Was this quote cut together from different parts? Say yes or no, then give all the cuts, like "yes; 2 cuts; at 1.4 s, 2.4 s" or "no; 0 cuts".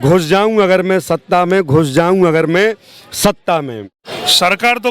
yes; 1 cut; at 4.0 s